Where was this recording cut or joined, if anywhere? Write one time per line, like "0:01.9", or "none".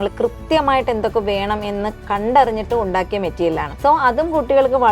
0:02.0
0:03.7